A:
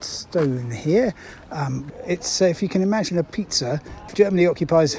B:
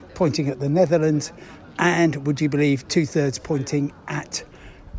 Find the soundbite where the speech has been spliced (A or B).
A